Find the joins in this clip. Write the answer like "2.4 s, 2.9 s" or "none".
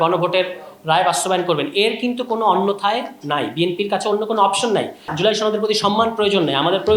5.1 s